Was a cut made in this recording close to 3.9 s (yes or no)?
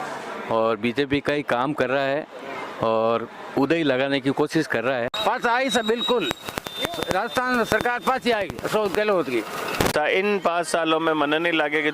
no